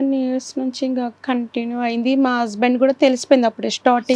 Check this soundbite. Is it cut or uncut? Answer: uncut